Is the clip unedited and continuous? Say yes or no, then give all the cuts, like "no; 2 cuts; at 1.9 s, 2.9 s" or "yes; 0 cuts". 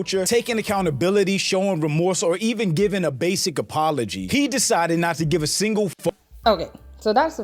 yes; 0 cuts